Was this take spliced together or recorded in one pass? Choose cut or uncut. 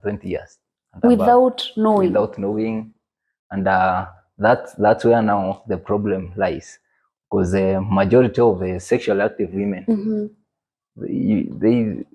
uncut